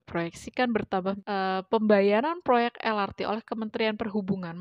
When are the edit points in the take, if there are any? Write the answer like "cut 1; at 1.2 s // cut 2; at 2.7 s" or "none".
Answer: cut 1; at 1.2 s